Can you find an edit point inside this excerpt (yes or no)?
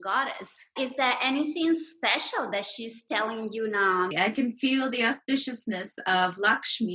yes